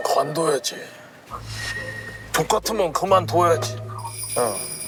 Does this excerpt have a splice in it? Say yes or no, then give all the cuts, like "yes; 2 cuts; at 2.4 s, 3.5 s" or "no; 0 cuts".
no; 0 cuts